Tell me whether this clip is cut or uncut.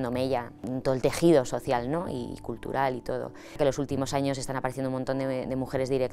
uncut